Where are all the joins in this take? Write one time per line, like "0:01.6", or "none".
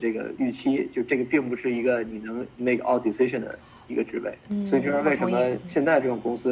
0:02.5
0:04.4
0:05.6